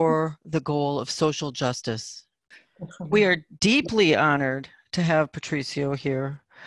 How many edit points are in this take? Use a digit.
1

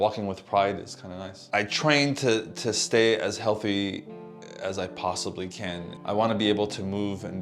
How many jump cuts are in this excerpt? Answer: 2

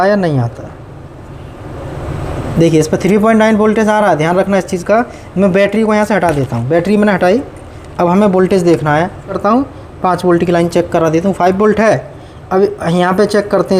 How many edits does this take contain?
1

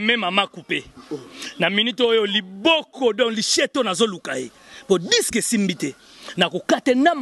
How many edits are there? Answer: 0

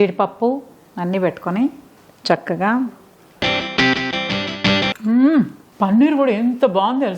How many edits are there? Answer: 2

